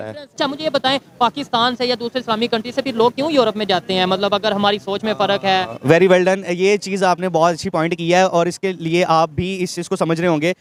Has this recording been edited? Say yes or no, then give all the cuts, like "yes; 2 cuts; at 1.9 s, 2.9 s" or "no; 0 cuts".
no; 0 cuts